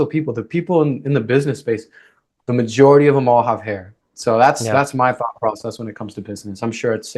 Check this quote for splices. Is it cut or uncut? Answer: uncut